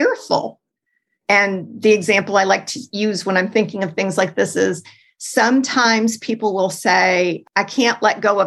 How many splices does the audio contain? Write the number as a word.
two